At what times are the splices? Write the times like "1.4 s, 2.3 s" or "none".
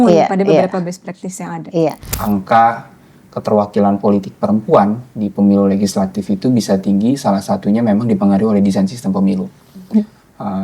2.1 s